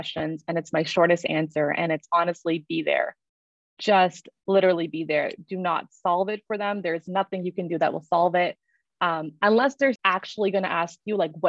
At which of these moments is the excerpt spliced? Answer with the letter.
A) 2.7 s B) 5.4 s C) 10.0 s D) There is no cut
C